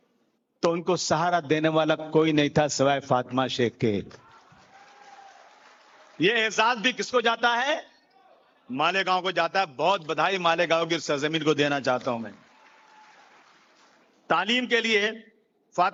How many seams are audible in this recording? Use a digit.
0